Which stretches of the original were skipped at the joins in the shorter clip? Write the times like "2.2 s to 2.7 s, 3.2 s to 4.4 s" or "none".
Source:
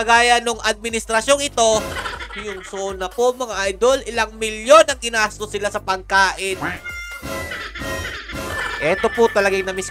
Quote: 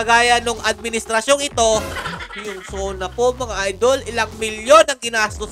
none